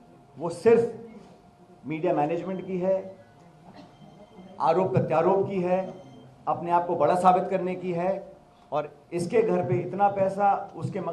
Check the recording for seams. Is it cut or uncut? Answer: uncut